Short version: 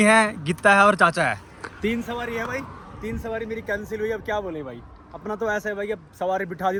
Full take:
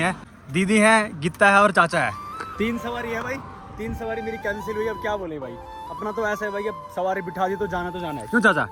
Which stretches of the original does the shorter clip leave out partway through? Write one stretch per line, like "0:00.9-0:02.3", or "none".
none